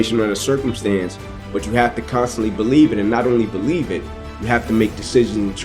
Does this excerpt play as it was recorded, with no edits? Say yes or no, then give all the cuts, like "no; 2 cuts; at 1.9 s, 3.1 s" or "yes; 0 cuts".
yes; 0 cuts